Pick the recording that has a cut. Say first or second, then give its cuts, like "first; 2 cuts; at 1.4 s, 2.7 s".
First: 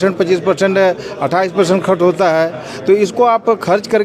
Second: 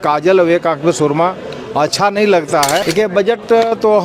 second; 1 cut; at 2.8 s